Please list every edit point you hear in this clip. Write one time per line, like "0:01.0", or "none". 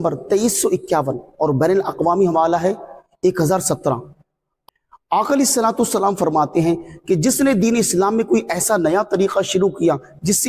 none